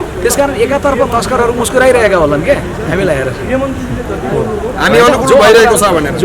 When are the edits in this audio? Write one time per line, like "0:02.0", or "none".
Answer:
none